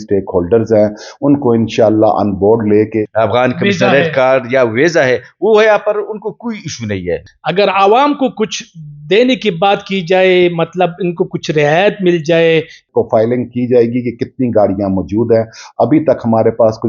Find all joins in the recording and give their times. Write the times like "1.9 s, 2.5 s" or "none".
3.1 s, 7.2 s, 12.8 s